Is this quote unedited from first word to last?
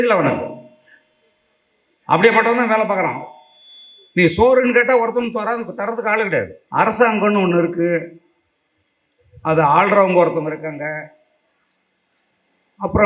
no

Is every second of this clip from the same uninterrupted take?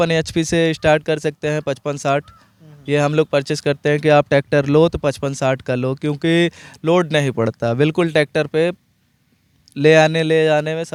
yes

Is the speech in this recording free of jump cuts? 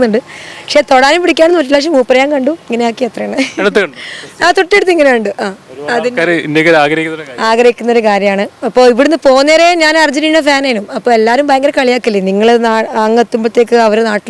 yes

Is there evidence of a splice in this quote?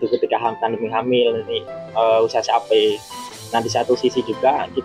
no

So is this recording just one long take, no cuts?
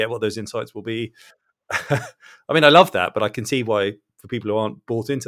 yes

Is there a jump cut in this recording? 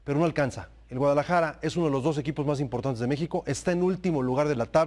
no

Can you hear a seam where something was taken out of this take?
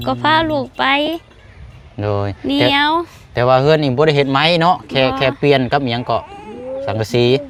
no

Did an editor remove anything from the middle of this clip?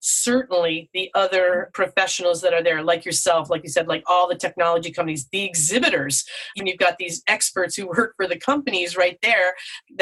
yes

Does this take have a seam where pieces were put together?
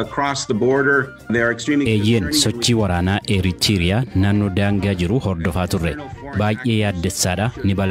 no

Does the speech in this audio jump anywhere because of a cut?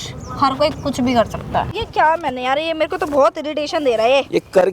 yes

